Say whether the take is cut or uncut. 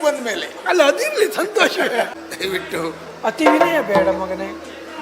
cut